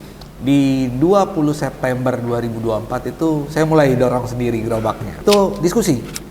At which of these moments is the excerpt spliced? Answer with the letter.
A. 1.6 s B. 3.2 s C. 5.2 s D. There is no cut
C